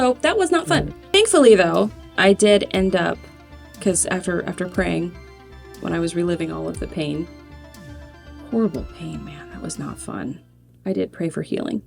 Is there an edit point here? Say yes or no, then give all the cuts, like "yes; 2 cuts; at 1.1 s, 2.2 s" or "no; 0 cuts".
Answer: yes; 1 cut; at 1.0 s